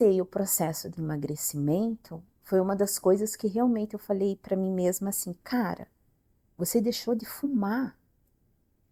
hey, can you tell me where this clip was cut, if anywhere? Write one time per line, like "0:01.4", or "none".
none